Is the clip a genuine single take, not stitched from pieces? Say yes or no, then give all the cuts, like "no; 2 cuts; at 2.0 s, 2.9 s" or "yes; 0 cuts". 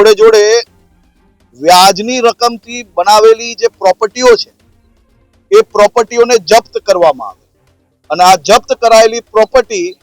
yes; 0 cuts